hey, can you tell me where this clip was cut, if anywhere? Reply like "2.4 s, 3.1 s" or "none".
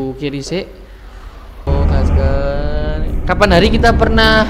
1.7 s

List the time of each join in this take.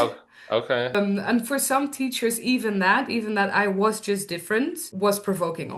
0.9 s, 4.9 s

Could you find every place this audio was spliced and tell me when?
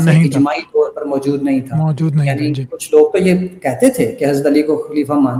none

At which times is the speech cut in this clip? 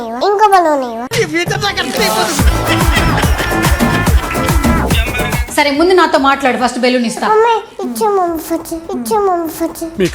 5.4 s

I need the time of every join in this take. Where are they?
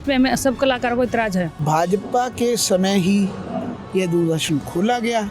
1.6 s

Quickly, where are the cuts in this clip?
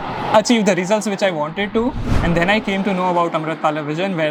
none

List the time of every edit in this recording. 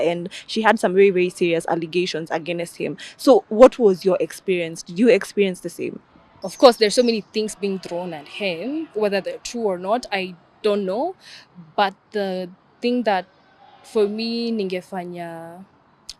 6.4 s

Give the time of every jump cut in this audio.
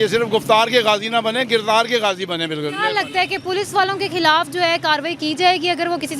none

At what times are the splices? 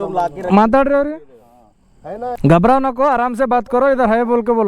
2.4 s

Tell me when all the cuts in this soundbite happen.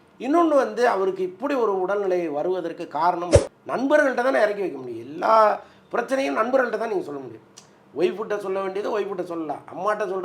3.4 s

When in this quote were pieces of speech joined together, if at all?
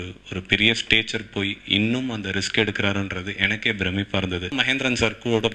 4.5 s

